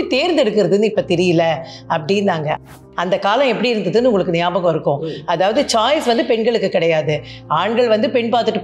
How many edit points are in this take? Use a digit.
1